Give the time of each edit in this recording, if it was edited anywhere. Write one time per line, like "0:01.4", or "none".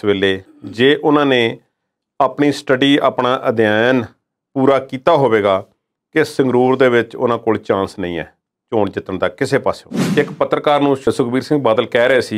0:10.0